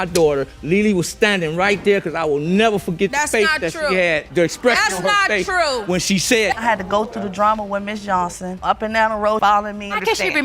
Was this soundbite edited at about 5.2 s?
no; 1 cut; at 6.6 s

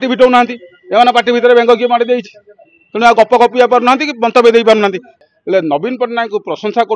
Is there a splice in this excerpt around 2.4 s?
no; 1 cut; at 5.1 s

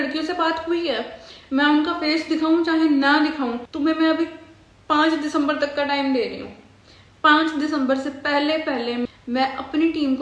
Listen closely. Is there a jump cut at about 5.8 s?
no; 2 cuts; at 3.7 s, 9.0 s

